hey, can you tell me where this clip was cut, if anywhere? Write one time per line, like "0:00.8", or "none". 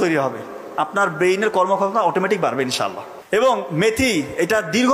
0:03.1